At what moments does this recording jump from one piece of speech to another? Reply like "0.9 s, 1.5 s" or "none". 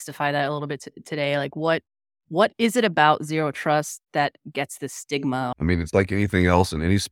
5.5 s

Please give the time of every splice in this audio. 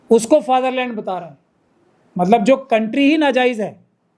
none

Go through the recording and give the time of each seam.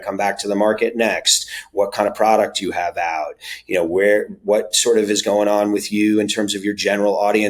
none

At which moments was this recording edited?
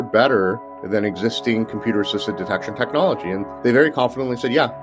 3.5 s

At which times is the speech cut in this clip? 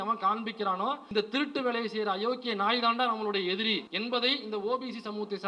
1.0 s, 3.9 s

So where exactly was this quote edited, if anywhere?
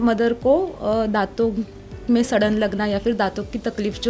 none

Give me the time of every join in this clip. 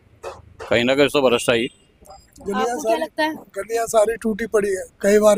none

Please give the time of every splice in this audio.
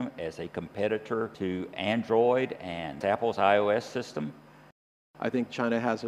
1.3 s, 5.0 s

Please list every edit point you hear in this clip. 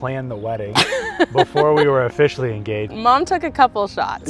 2.9 s

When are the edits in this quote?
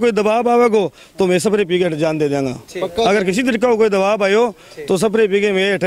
none

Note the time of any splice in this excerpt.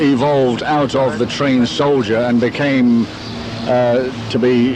1.3 s

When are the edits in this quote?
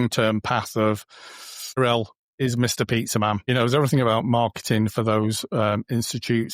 1.8 s, 3.4 s

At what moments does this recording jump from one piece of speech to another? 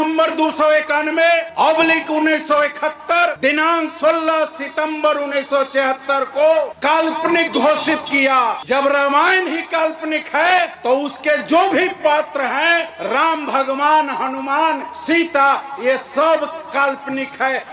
1.5 s, 3.4 s, 6.7 s, 8.6 s, 10.8 s, 12.9 s, 14.9 s

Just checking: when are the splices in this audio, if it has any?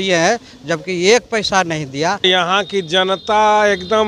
2.2 s

